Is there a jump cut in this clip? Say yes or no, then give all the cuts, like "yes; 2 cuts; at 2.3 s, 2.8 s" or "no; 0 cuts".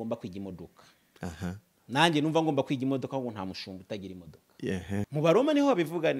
yes; 1 cut; at 5.1 s